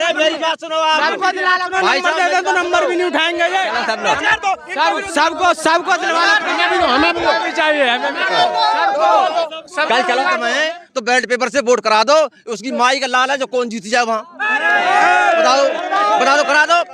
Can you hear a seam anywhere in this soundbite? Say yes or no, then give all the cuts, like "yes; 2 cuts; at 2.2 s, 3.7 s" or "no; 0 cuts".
yes; 2 cuts; at 3.7 s, 10.5 s